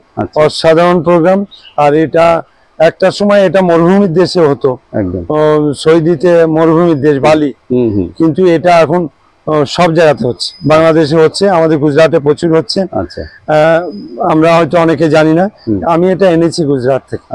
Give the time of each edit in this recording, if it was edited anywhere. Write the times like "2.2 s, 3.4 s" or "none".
none